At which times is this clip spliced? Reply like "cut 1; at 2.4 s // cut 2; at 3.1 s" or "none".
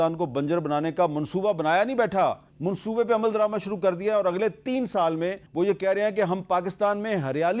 none